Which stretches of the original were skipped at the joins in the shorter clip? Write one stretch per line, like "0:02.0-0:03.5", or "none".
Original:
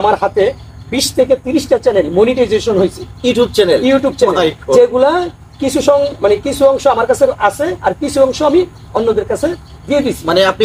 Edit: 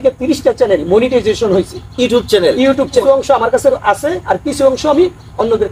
0:04.3-0:06.6